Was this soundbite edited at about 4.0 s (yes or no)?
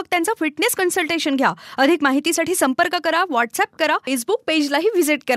yes